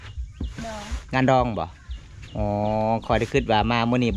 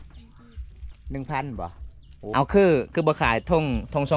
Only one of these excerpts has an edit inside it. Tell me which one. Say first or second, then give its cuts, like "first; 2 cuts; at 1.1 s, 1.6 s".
second; 1 cut; at 2.3 s